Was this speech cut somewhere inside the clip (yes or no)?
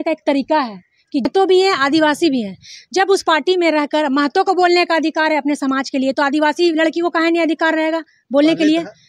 yes